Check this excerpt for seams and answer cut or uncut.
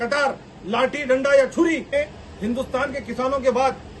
cut